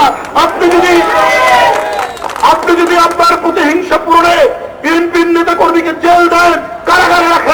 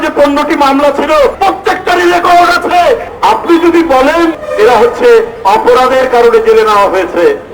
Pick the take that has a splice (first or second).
second